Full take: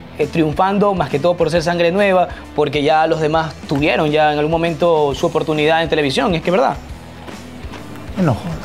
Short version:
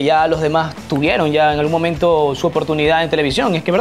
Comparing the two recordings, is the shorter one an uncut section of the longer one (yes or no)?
yes